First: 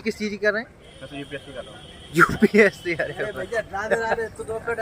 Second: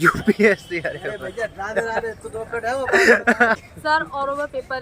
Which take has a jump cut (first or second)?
second